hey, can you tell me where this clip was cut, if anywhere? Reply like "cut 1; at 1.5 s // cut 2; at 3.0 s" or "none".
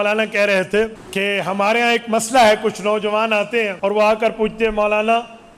cut 1; at 1.0 s // cut 2; at 3.7 s